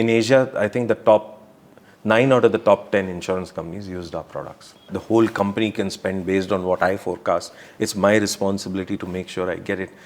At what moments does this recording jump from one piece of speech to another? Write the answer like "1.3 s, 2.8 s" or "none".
4.9 s